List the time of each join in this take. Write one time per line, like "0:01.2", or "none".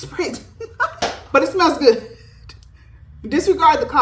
0:01.0